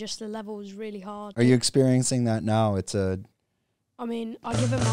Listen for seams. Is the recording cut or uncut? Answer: cut